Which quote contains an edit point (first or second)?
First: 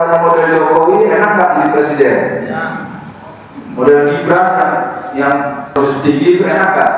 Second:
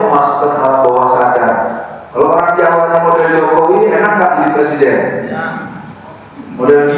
first